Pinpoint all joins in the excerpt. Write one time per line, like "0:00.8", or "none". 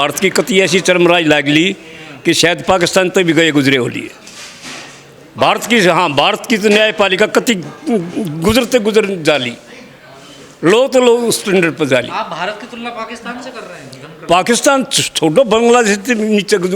none